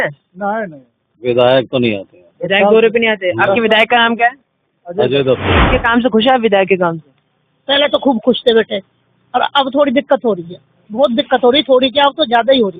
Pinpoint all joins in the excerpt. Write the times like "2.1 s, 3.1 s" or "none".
5.5 s